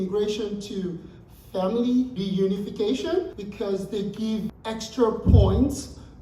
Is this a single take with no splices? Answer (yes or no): no